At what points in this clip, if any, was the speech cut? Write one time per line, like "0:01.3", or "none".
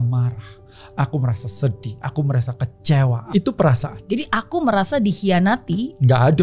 0:03.2